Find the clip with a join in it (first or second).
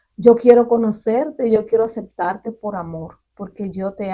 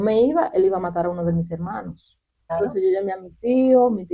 second